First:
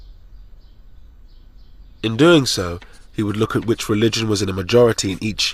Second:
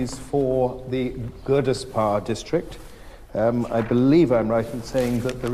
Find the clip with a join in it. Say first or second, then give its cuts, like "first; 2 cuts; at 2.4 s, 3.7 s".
second; 1 cut; at 3.7 s